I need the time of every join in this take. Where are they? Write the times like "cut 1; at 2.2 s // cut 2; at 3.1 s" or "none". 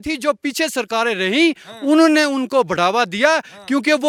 none